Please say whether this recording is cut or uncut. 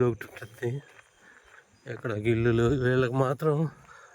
uncut